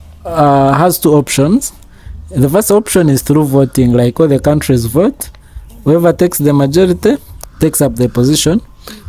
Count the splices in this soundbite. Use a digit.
0